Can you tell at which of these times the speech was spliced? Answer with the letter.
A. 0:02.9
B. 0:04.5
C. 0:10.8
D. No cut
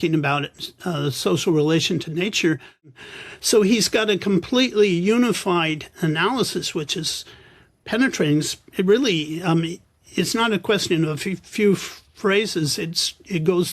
A